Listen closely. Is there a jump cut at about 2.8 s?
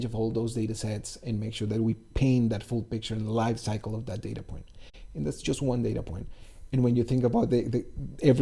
no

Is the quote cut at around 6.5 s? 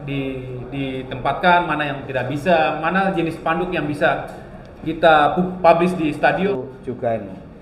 yes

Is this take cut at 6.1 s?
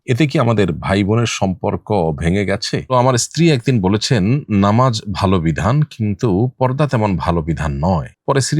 no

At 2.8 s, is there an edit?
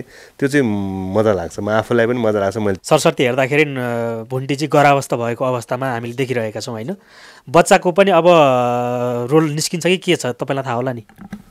yes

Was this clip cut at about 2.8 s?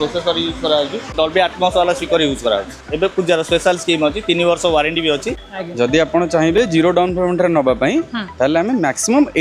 yes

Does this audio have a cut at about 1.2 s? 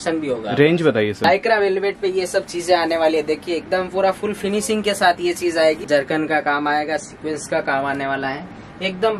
yes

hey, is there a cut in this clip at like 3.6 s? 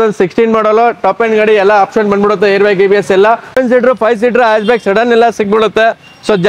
yes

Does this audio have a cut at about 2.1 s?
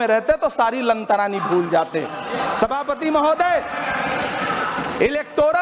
no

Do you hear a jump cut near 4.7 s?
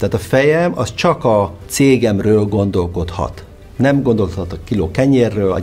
no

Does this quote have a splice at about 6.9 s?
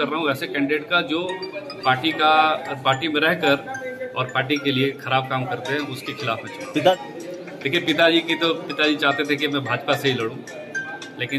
yes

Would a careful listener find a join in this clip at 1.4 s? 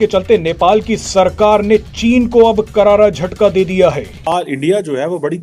no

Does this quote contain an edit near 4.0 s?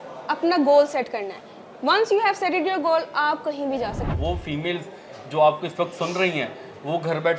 yes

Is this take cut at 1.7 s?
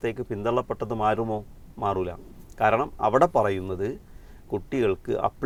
no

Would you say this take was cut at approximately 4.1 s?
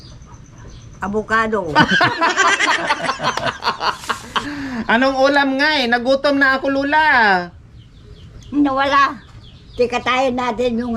yes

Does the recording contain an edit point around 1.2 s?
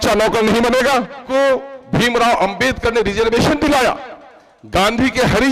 yes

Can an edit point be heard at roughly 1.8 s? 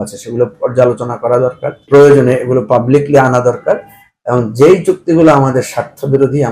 yes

